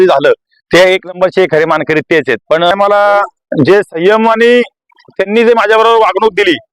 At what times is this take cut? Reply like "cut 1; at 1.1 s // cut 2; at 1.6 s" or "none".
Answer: cut 1; at 2.7 s